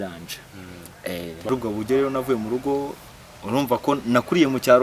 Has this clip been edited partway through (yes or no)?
yes